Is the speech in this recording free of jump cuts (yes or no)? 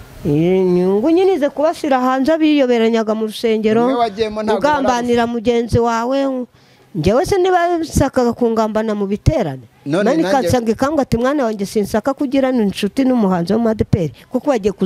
yes